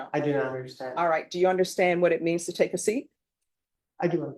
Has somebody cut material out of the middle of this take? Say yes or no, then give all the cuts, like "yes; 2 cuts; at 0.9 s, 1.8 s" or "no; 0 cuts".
no; 0 cuts